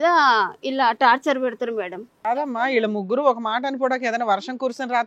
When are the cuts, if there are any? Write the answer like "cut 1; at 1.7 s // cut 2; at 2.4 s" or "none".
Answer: cut 1; at 2.1 s